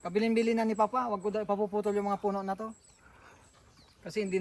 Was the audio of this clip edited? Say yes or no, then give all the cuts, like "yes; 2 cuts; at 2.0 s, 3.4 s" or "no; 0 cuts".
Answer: no; 0 cuts